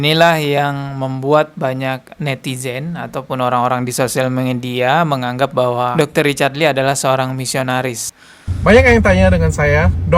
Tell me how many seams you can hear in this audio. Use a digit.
1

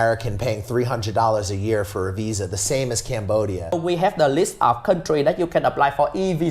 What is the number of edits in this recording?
1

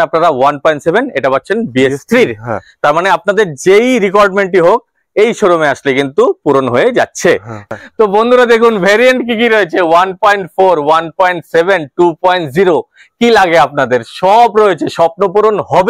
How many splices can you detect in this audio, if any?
1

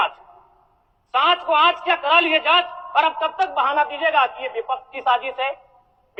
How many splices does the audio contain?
0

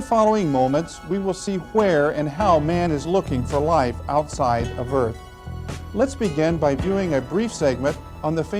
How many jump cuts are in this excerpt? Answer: 1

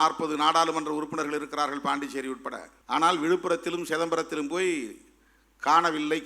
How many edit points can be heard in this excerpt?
1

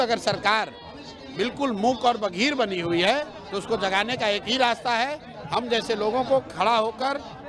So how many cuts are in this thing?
0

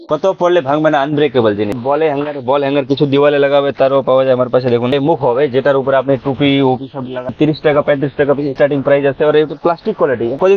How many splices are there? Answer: 3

